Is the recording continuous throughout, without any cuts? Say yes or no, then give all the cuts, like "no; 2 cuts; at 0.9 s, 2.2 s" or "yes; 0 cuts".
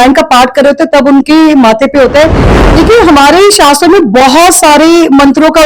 no; 1 cut; at 2.5 s